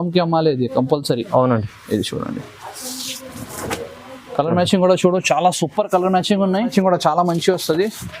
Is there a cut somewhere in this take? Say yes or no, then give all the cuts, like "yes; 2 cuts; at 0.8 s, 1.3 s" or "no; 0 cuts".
yes; 1 cut; at 6.7 s